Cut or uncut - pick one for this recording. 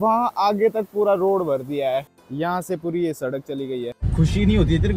cut